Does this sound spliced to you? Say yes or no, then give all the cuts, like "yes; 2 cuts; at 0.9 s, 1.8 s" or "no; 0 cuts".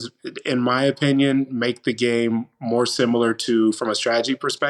no; 0 cuts